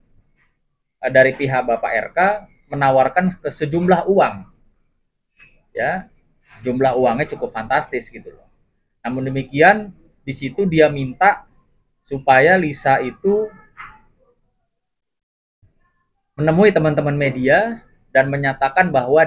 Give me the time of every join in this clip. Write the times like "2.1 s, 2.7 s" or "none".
none